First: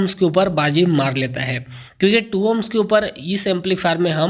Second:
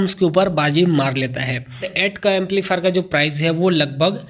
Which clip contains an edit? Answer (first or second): second